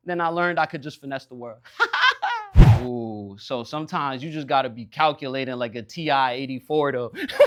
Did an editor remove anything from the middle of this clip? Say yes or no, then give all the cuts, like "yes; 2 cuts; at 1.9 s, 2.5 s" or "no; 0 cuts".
no; 0 cuts